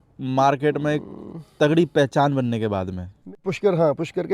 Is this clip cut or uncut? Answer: cut